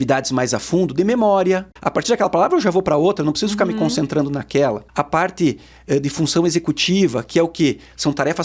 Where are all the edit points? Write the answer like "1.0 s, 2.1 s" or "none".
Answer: 1.8 s, 4.8 s